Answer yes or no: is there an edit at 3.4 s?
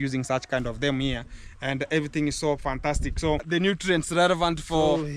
yes